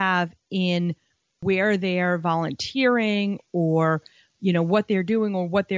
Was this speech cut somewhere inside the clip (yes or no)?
yes